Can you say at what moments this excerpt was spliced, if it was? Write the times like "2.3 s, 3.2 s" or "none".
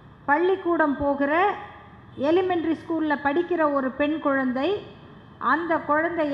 none